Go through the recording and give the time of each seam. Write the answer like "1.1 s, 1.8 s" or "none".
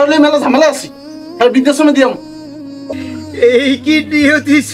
2.9 s

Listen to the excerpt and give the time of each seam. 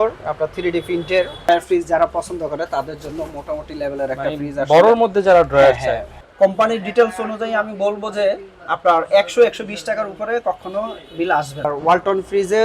1.5 s, 6.2 s, 11.7 s

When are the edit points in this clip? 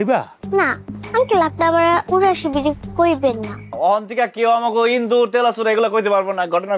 3.6 s

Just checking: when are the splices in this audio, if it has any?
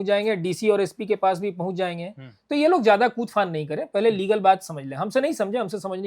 none

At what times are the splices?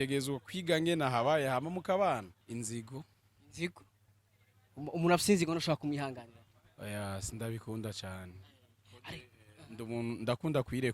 2.4 s

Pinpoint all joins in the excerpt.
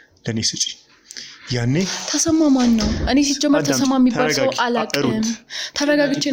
none

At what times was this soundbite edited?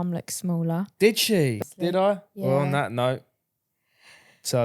1.6 s

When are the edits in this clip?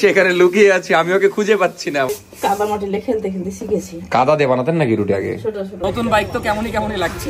2.1 s, 5.8 s

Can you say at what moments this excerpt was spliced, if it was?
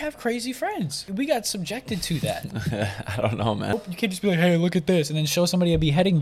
1.0 s, 3.7 s

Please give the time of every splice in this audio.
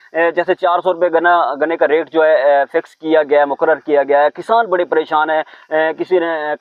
none

